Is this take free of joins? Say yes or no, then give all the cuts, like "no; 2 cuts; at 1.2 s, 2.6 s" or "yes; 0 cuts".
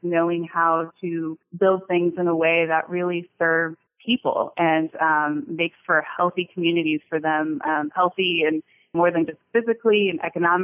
no; 3 cuts; at 1.4 s, 3.9 s, 8.9 s